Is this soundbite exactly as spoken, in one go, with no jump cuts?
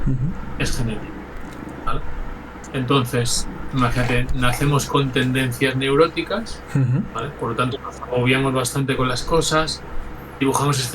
yes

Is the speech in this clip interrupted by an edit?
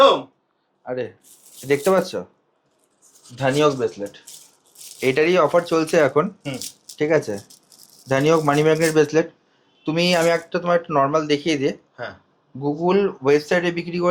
no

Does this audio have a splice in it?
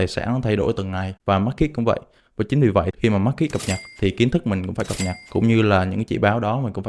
yes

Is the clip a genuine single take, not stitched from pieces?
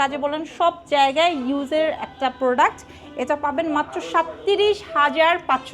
yes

